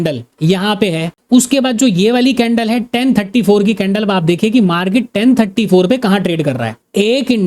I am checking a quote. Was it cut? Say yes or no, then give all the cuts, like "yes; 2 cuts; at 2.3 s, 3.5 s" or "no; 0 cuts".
no; 0 cuts